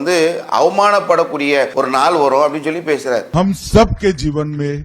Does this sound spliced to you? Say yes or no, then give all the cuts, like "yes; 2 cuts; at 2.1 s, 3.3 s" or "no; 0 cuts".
yes; 2 cuts; at 1.7 s, 3.3 s